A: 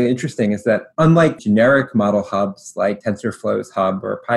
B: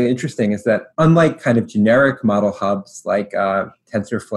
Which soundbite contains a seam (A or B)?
A